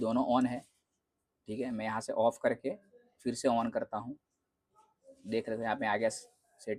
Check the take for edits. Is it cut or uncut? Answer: uncut